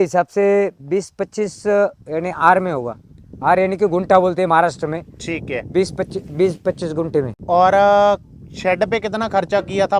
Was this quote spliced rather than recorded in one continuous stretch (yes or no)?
no